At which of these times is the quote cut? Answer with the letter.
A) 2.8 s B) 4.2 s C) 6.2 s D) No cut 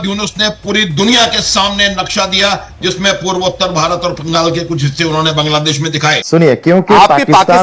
C